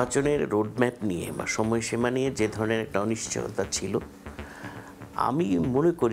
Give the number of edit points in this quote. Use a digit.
0